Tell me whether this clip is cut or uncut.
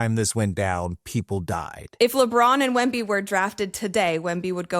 cut